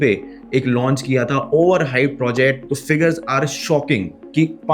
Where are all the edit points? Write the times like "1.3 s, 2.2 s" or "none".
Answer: 2.6 s